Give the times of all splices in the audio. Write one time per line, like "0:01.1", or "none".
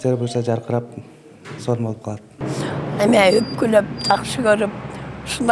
0:02.6